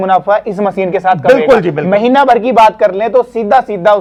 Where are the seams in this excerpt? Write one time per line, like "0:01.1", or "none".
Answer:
none

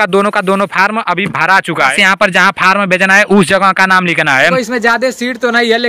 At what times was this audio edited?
0:01.9
0:04.5

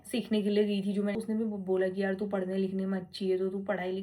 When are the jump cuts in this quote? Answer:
0:01.1

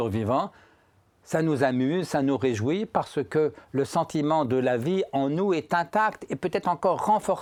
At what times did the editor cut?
none

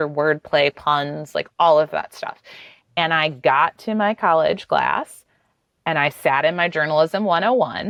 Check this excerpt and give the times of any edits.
none

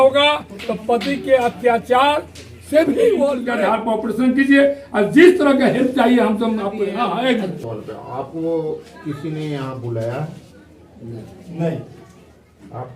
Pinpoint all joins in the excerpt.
0:03.5
0:06.9

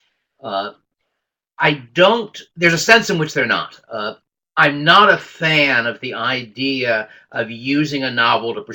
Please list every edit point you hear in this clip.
none

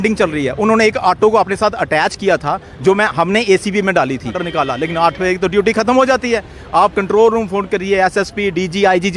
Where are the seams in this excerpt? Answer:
0:04.4

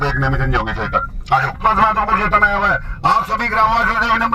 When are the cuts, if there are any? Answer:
0:01.6

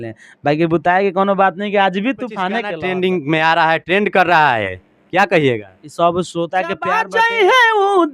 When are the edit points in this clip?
0:02.7
0:06.9

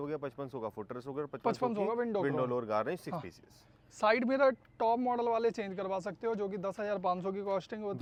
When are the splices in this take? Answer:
none

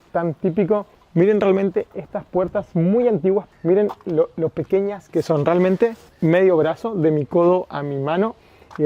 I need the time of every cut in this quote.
0:01.0
0:03.5
0:06.1

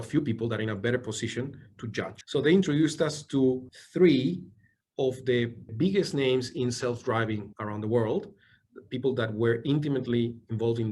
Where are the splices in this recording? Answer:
0:02.2
0:03.8
0:05.6

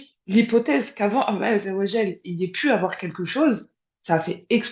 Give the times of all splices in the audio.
none

